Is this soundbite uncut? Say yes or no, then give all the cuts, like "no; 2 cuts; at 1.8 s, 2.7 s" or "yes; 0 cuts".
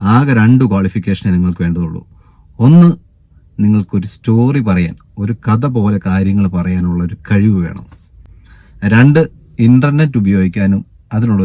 yes; 0 cuts